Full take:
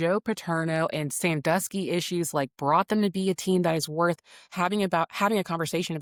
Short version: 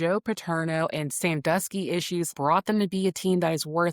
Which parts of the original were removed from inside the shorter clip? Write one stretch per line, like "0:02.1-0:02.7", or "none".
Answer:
0:02.3-0:02.5